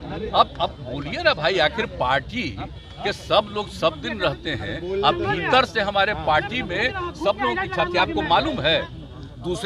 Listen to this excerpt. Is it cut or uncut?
uncut